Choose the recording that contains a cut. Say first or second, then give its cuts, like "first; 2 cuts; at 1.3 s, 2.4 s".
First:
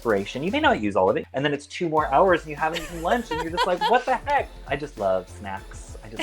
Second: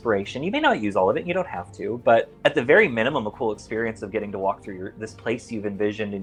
first; 2 cuts; at 1.2 s, 4.6 s